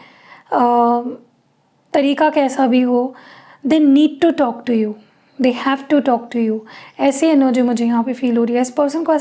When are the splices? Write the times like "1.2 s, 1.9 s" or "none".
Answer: none